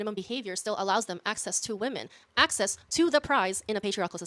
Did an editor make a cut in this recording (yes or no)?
no